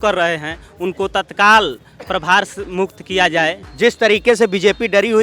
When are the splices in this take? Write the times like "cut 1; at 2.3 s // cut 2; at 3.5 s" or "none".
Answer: cut 1; at 3.6 s